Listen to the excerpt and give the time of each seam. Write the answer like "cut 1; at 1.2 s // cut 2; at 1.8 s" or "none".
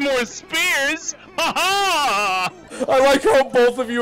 cut 1; at 2.7 s